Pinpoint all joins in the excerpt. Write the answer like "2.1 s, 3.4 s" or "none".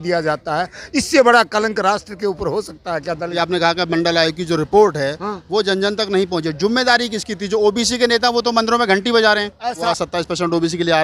3.3 s, 9.9 s